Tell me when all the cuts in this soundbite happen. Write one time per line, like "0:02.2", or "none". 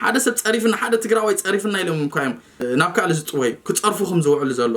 0:02.6